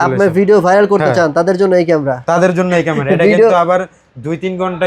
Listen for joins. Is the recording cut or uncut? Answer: uncut